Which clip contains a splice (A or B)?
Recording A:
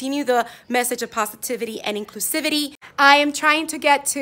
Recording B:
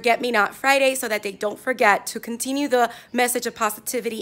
A